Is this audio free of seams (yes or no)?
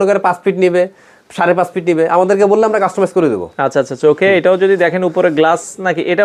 yes